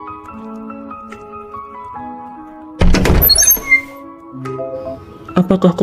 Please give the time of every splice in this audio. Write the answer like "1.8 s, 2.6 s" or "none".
1.4 s